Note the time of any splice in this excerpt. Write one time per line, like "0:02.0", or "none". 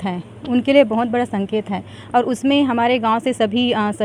none